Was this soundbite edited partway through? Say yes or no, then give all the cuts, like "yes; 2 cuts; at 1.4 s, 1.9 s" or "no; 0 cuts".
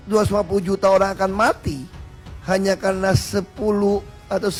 no; 0 cuts